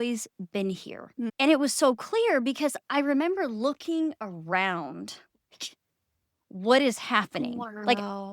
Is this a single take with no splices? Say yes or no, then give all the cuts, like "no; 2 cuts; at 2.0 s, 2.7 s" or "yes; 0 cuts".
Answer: no; 1 cut; at 1.3 s